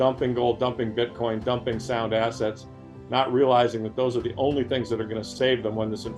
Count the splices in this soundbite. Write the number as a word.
zero